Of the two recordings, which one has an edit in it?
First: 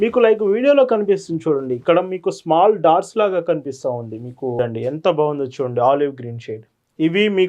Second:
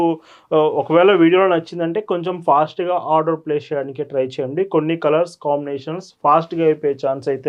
first; 1 cut; at 4.6 s

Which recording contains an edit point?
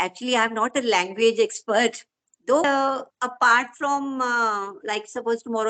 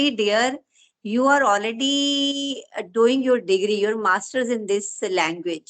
first; 1 cut; at 2.6 s

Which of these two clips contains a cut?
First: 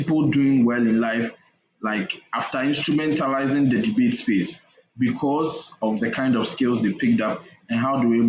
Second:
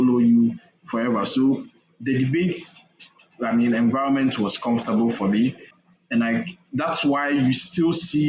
second; 1 cut; at 5.7 s

